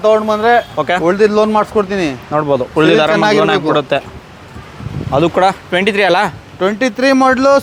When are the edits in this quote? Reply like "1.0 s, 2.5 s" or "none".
none